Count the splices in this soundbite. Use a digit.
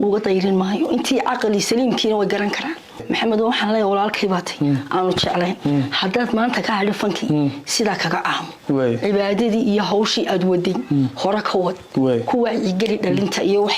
1